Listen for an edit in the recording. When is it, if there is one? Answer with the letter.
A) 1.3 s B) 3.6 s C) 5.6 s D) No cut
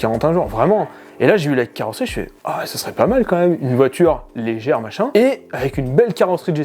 D